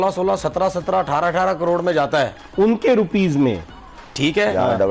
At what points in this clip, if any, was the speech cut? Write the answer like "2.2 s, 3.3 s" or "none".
none